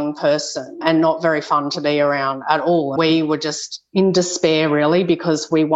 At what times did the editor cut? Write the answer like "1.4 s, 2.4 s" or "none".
3.0 s